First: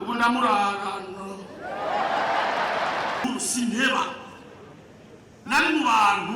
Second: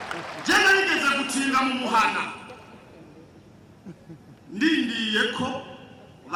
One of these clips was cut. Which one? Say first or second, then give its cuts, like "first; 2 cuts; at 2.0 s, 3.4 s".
first; 1 cut; at 3.2 s